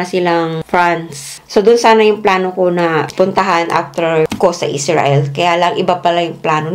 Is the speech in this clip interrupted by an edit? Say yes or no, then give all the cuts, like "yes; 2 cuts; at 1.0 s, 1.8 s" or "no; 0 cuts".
yes; 1 cut; at 1.4 s